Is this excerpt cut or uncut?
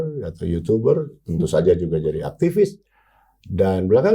uncut